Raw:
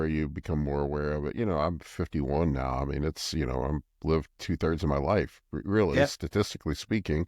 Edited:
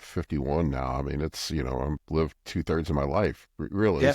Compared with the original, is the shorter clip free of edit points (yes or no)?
no